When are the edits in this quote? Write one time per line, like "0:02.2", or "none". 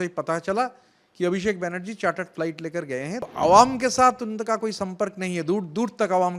0:03.3